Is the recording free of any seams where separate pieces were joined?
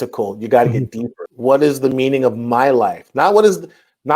no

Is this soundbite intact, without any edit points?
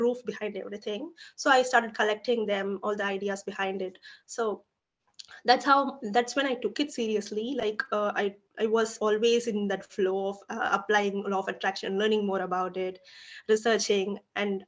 yes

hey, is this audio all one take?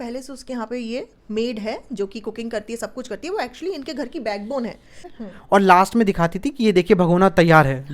no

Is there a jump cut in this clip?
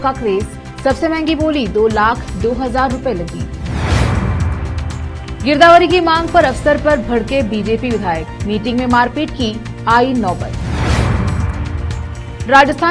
no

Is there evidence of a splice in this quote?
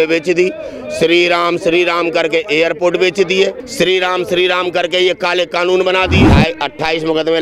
yes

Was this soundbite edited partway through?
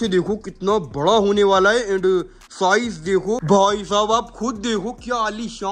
yes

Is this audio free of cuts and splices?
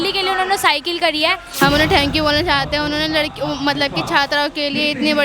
no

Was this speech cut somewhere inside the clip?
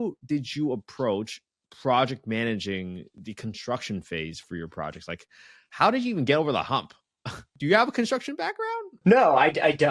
yes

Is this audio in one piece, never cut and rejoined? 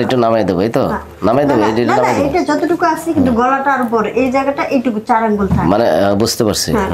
yes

